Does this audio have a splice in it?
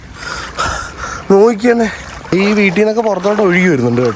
yes; 1 cut; at 2.2 s

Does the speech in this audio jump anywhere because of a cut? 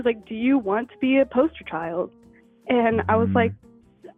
no; 0 cuts

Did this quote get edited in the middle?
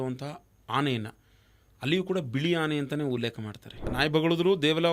yes; 1 cut; at 3.8 s

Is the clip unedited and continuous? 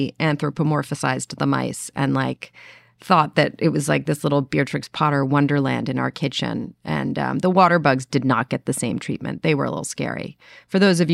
yes; 0 cuts

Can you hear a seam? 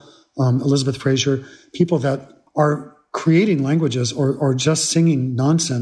yes; 1 cut; at 2.4 s

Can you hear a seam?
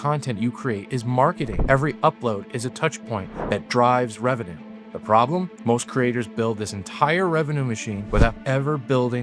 yes; 2 cuts; at 1.5 s, 8.0 s

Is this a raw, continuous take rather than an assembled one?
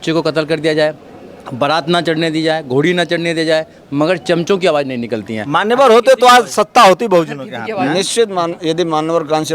yes; 0 cuts

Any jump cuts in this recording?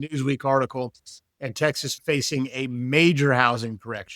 yes; 1 cut; at 1.9 s

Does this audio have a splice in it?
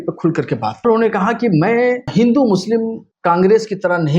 yes; 3 cuts; at 0.8 s, 2.1 s, 3.1 s

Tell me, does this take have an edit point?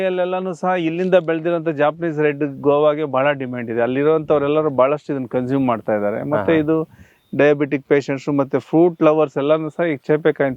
no; 0 cuts

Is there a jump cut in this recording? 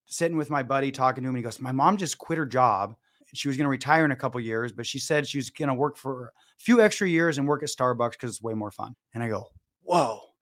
no; 0 cuts

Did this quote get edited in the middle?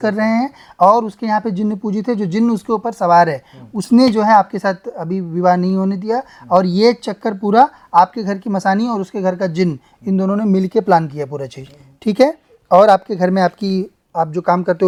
no; 0 cuts

